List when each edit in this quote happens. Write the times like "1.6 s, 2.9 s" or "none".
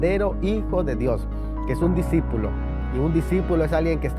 none